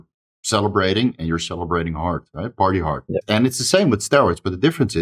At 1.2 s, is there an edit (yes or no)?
no